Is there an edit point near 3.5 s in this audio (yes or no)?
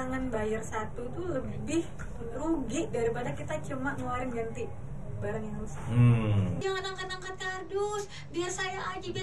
no